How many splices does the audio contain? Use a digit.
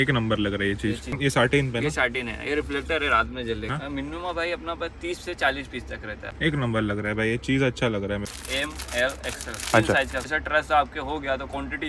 5